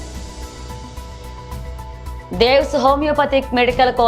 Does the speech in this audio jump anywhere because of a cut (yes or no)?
no